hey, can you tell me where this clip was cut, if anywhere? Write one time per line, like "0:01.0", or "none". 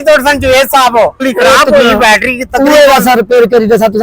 0:01.2